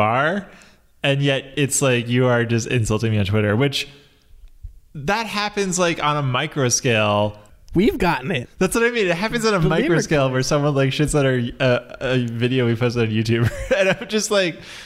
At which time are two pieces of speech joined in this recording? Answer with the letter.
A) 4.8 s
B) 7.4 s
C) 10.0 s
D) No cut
B